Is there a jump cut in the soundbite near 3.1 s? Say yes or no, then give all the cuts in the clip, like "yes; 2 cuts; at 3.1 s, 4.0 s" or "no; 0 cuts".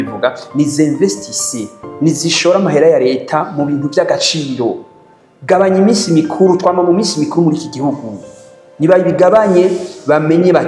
no; 0 cuts